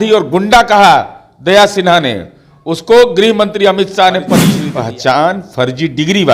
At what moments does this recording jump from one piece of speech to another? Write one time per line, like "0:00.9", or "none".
0:04.6